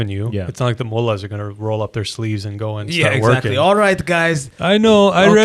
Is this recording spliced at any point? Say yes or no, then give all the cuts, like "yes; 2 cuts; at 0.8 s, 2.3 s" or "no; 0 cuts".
no; 0 cuts